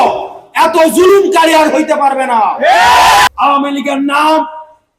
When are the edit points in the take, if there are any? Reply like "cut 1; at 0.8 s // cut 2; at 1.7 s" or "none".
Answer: cut 1; at 3.3 s

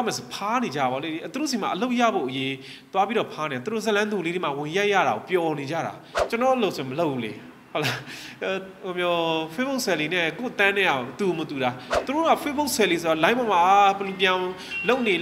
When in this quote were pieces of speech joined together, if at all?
cut 1; at 11.9 s

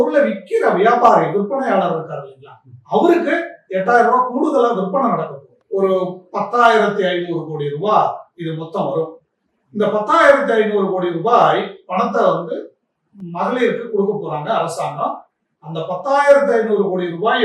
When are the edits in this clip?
cut 1; at 5.5 s

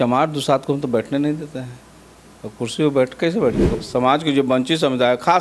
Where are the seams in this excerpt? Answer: cut 1; at 3.6 s

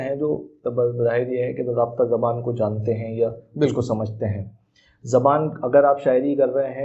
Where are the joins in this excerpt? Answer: none

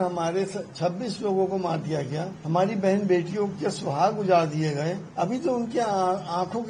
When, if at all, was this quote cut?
cut 1; at 2.3 s // cut 2; at 5.0 s

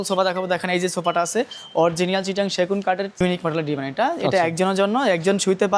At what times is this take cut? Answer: cut 1; at 3.2 s

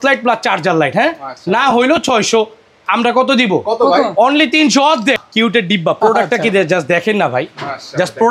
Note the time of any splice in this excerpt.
cut 1; at 5.2 s

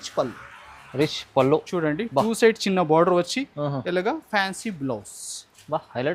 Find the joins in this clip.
none

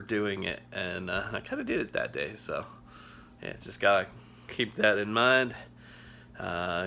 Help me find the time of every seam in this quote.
none

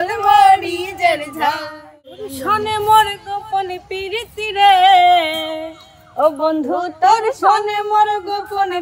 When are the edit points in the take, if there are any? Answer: cut 1; at 2.3 s

